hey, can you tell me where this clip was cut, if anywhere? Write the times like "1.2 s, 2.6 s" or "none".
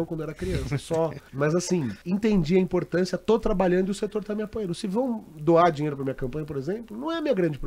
1.2 s, 2.0 s

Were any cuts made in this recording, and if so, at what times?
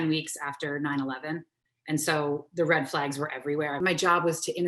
3.8 s

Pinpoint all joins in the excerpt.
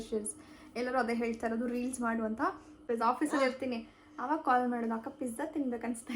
2.8 s

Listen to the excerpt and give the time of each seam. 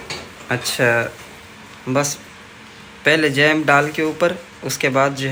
none

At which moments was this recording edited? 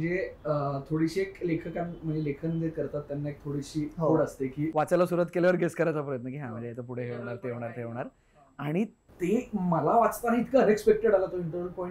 4.7 s

